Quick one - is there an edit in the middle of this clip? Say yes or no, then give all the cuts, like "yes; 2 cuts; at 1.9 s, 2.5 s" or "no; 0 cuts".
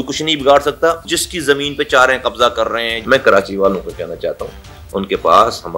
yes; 2 cuts; at 1.2 s, 3.0 s